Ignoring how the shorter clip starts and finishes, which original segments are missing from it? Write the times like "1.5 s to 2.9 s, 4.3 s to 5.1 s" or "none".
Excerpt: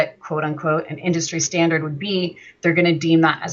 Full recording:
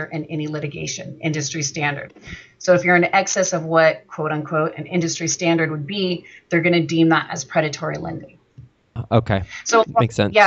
none

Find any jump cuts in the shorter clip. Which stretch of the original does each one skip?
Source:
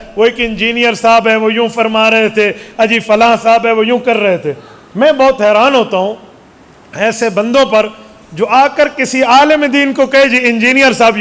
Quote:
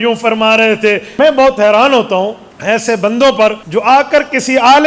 2.6 s to 4.9 s, 6.3 s to 6.8 s, 8.0 s to 8.3 s

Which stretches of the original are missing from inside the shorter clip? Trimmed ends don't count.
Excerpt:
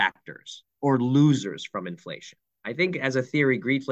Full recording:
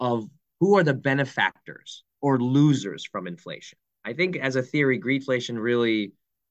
none

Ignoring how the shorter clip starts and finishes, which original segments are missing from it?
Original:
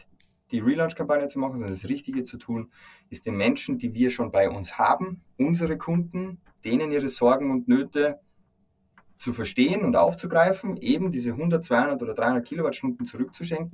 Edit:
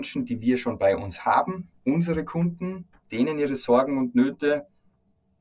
none

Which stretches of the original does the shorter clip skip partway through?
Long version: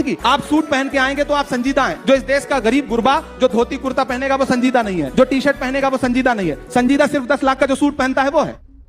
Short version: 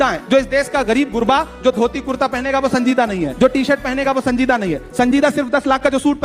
none

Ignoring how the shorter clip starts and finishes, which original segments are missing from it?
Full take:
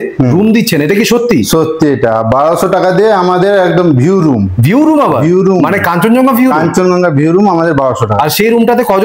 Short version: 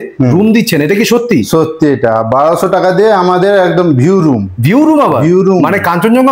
none

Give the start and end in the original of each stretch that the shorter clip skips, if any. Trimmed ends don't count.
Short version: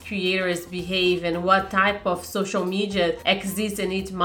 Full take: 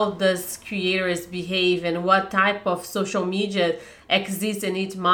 3.8 s to 4.0 s

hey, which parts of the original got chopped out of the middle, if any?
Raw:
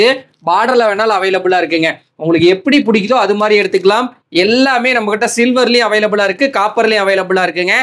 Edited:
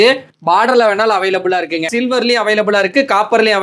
1.9 s to 5.4 s

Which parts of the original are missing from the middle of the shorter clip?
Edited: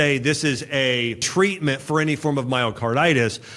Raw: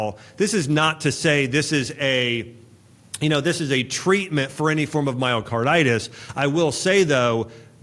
2.5 s to 3.9 s

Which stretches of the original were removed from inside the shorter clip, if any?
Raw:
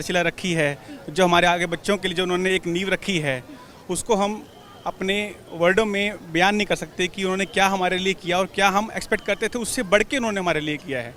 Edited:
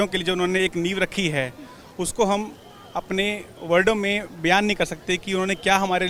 none

